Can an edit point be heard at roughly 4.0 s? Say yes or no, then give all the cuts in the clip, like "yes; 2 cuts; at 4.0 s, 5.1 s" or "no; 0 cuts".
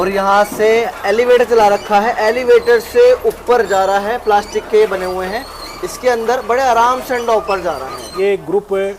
no; 2 cuts; at 0.8 s, 8.0 s